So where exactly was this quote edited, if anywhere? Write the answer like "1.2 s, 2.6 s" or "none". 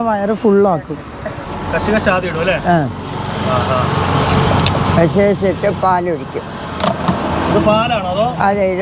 1.5 s